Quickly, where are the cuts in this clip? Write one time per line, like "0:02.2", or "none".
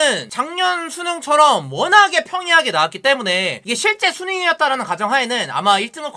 0:03.6